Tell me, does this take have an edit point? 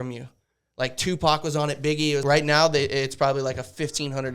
yes; 1 cut; at 2.2 s

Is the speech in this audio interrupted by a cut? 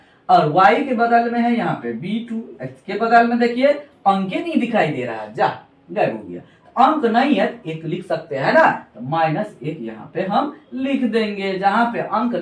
no; 0 cuts

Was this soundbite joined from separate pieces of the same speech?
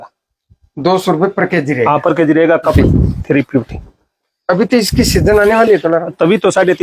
yes; 1 cut; at 2.7 s

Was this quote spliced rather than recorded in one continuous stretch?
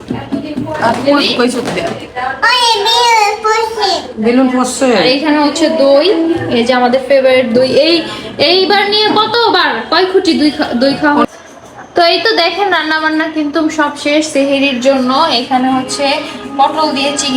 yes; 1 cut; at 11.2 s

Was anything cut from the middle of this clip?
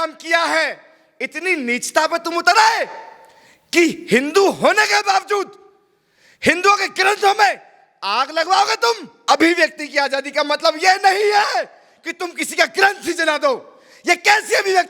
yes; 1 cut; at 9.2 s

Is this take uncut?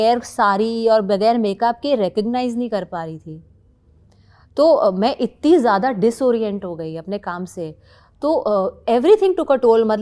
yes; 0 cuts

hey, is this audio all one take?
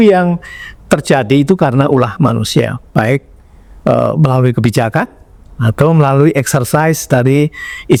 yes; 0 cuts

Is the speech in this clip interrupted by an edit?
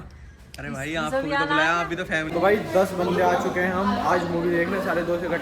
yes; 1 cut; at 2.3 s

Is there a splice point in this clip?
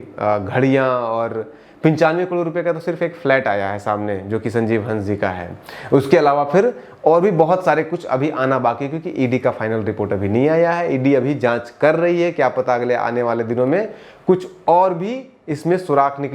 no; 0 cuts

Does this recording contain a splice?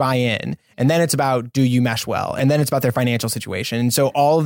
yes; 1 cut; at 2.4 s

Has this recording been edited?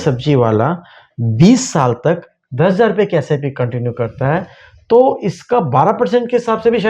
no; 0 cuts

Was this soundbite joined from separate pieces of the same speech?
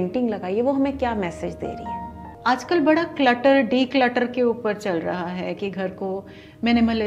yes; 1 cut; at 2.2 s

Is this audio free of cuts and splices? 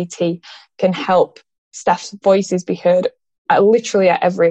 yes; 0 cuts

